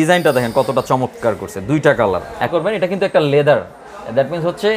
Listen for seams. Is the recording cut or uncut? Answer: cut